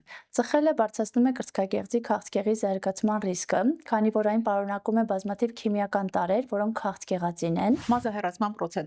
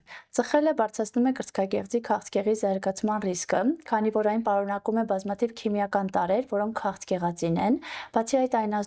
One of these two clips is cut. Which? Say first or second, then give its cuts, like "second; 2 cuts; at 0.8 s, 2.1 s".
first; 1 cut; at 7.8 s